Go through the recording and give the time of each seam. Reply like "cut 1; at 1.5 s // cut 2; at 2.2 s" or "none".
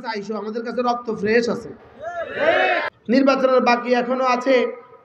cut 1; at 2.9 s